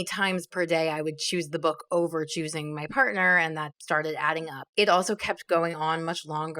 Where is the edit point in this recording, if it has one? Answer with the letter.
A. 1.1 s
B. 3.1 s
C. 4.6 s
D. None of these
C